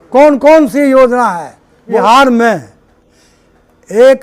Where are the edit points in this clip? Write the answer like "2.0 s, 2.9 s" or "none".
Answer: 1.9 s